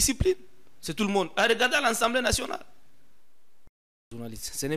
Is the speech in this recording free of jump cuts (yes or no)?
no